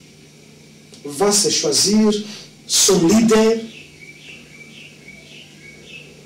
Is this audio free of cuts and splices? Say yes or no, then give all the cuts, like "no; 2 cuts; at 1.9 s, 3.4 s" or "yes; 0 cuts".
yes; 0 cuts